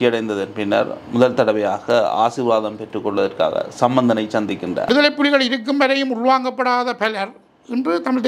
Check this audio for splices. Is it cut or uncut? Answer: cut